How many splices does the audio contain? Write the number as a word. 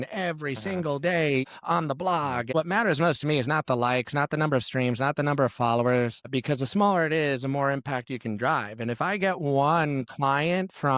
one